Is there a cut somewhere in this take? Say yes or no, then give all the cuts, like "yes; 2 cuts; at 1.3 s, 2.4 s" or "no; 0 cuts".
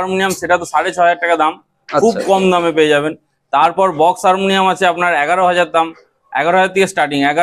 no; 0 cuts